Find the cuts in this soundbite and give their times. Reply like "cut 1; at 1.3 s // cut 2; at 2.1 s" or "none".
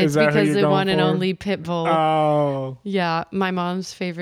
none